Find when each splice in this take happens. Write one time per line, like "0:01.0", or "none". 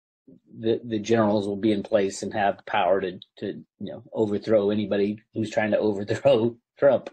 none